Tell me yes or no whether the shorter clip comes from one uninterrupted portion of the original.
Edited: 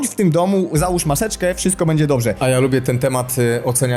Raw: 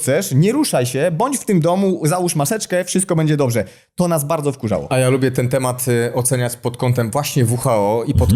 no